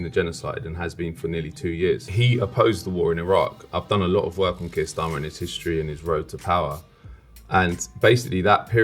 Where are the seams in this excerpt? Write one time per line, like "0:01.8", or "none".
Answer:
0:02.1